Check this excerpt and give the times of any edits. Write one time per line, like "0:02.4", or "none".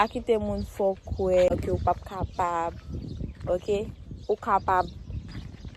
0:01.5